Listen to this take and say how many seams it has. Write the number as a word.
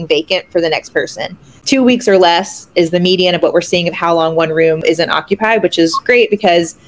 two